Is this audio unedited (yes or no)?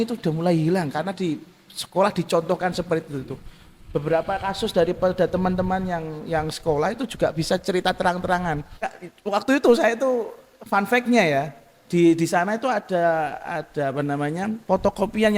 no